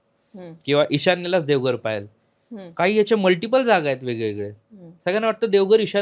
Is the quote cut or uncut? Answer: uncut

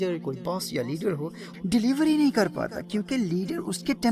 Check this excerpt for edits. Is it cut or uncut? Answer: cut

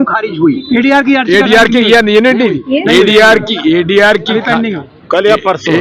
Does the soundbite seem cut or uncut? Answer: uncut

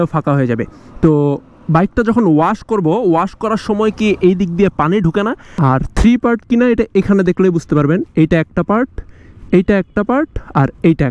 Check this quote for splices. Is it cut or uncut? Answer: cut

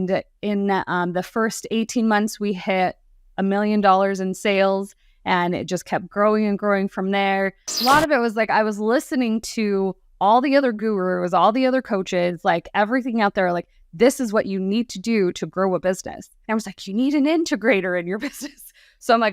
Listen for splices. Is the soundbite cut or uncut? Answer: cut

